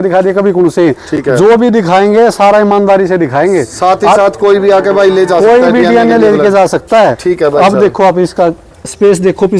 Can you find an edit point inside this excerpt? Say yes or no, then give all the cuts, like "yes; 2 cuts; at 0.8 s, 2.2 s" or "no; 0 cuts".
no; 0 cuts